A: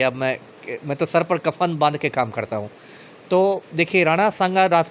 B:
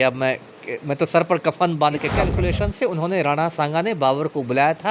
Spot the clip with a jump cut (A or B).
B